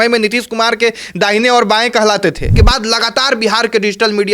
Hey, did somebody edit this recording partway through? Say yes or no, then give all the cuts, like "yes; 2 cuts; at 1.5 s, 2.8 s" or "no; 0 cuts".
yes; 1 cut; at 2.5 s